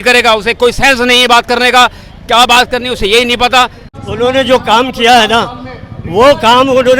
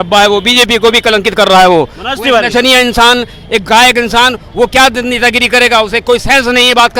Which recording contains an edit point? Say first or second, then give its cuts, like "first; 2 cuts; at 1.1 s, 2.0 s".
first; 1 cut; at 3.8 s